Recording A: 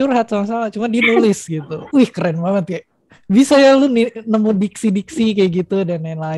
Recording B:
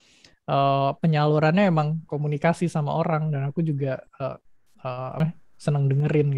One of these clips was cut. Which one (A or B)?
B